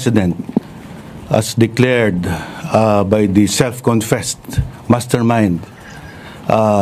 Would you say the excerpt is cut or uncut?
uncut